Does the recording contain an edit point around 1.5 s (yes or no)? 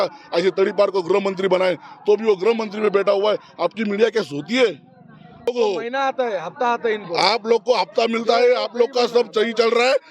no